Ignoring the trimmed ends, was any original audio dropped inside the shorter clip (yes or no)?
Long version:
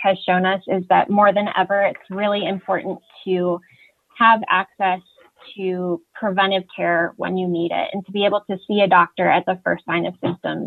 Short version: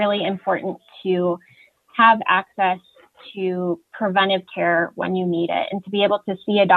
no